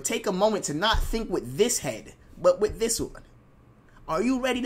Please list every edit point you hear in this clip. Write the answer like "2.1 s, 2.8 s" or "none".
none